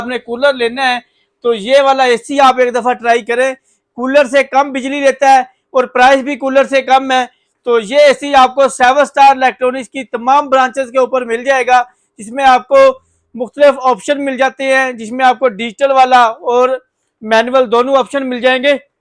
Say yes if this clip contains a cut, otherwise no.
no